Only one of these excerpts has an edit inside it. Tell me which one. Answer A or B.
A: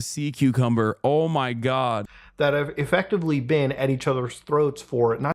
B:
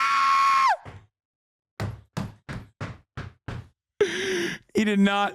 A